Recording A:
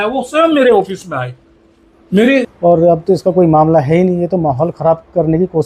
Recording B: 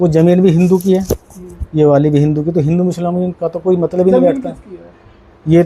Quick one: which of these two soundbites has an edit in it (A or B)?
A